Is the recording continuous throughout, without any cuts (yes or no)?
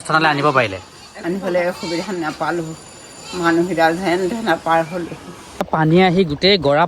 no